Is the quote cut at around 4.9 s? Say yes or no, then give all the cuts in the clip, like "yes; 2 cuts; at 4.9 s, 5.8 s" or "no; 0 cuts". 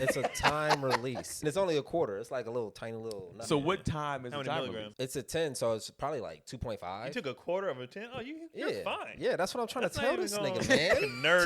yes; 2 cuts; at 1.4 s, 4.9 s